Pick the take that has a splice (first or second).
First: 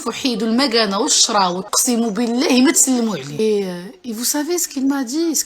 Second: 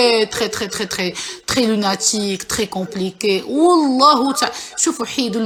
first